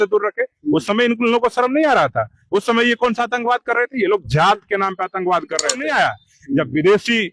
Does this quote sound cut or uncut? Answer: cut